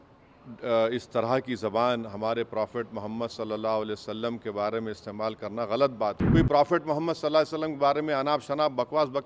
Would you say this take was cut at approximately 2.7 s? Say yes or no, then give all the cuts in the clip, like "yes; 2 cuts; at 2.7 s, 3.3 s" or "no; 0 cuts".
no; 1 cut; at 6.2 s